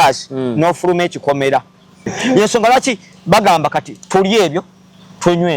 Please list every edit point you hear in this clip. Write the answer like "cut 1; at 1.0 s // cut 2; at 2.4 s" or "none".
cut 1; at 2.1 s